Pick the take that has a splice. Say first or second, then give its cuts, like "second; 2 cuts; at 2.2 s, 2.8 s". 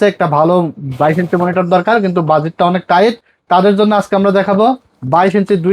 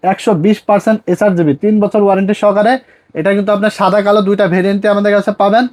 first; 1 cut; at 3.3 s